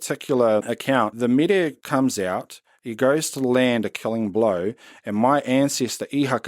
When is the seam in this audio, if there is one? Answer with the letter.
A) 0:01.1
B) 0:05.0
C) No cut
A